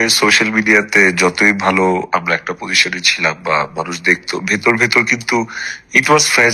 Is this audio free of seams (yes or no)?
yes